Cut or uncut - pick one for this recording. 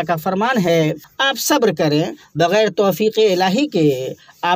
cut